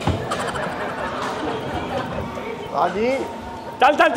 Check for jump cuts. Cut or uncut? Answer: uncut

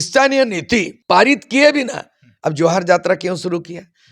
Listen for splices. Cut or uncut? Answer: cut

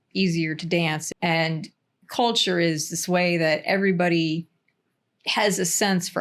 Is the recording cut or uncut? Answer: cut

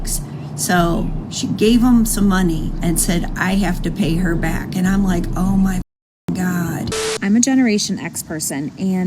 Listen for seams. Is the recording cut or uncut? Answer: cut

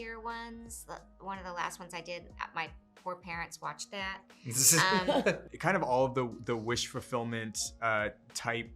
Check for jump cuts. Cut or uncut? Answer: cut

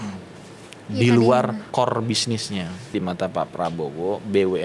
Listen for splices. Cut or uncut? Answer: cut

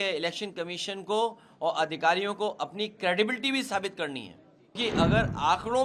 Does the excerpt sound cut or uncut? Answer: cut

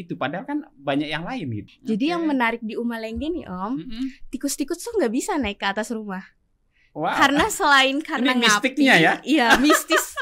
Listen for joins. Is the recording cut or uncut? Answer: cut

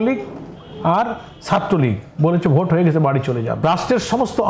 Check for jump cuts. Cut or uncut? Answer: cut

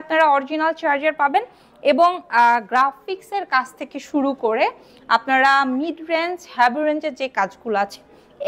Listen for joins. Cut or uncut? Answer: uncut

